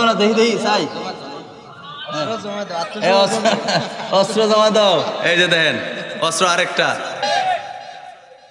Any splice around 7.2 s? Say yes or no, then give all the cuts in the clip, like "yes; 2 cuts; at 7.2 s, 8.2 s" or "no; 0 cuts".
yes; 1 cut; at 7.2 s